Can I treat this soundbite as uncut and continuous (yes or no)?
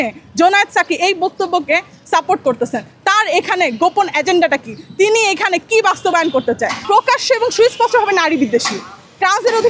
no